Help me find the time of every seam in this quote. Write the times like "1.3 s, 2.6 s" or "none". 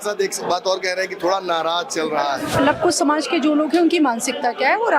2.5 s